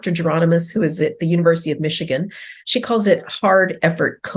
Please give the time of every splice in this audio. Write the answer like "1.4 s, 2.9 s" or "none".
none